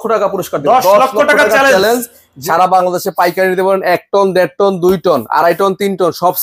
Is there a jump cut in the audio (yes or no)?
yes